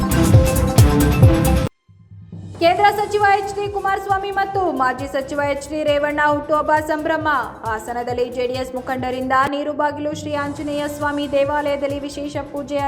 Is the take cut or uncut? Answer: cut